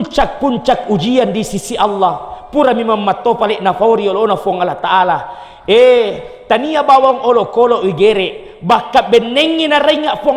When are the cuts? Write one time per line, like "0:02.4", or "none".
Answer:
none

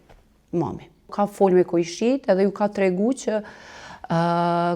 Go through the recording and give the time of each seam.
0:01.1

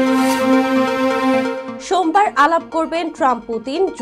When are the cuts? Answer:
none

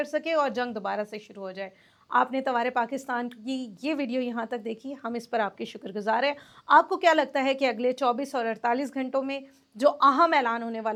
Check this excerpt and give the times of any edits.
none

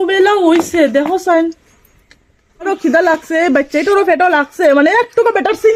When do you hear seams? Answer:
0:02.6

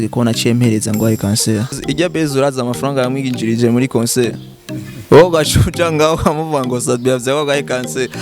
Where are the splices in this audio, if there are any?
0:01.8

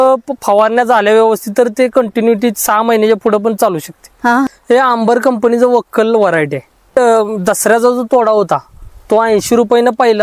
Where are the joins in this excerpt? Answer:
0:04.5
0:06.9

